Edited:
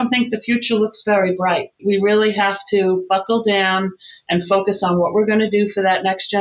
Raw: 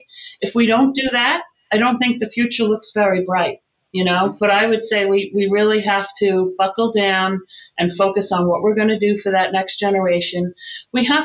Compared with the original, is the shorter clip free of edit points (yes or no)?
no